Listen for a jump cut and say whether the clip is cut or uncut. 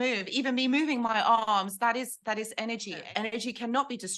cut